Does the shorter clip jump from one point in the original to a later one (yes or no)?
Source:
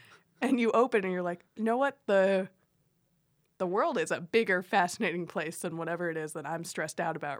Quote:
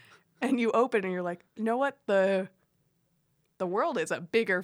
no